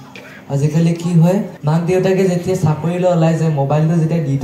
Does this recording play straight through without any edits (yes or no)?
no